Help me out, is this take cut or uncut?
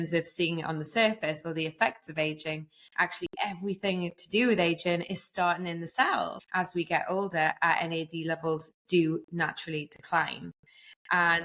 cut